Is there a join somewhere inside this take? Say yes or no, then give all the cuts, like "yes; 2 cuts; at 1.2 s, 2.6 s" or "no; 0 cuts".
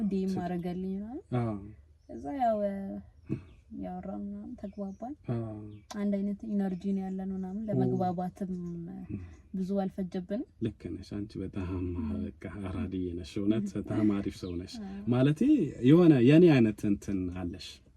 yes; 1 cut; at 10.5 s